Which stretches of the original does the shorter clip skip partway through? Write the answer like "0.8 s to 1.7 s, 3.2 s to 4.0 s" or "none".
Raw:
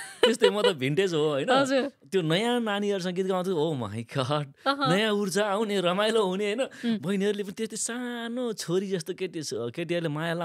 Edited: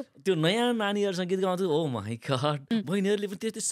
4.5 s to 6.8 s